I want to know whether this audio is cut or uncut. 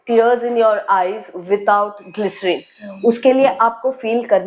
uncut